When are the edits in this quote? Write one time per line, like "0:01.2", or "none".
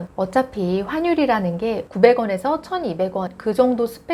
none